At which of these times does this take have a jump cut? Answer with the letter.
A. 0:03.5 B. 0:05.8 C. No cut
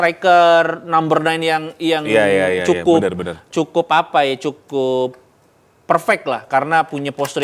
C